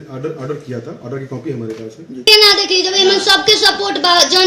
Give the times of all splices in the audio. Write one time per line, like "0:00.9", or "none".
0:02.3